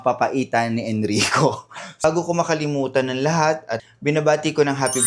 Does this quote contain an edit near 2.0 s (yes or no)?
yes